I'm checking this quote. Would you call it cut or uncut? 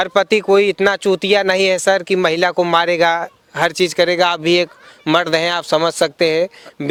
uncut